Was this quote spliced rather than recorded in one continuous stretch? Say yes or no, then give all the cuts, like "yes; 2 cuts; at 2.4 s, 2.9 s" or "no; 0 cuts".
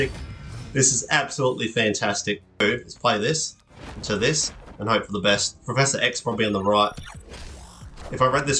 yes; 1 cut; at 2.6 s